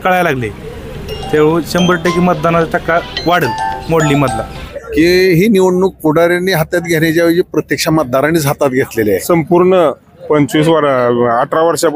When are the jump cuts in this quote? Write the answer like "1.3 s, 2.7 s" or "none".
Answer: 4.5 s, 9.2 s